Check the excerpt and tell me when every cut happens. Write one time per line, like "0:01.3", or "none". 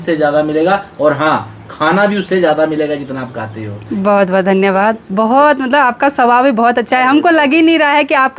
none